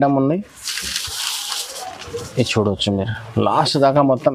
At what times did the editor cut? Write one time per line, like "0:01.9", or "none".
none